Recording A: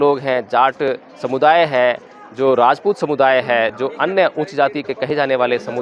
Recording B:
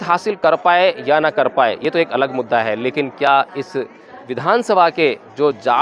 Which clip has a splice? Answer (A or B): B